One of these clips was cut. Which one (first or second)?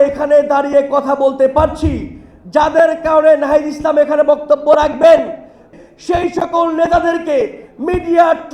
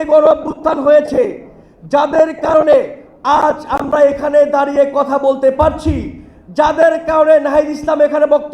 first